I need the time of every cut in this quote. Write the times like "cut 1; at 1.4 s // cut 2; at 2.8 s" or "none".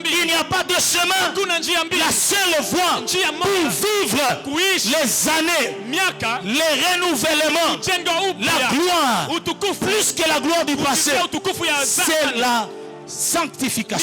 none